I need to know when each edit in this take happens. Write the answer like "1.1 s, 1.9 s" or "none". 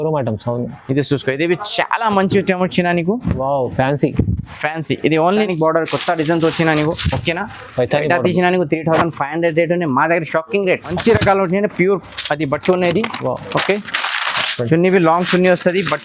5.5 s, 11.0 s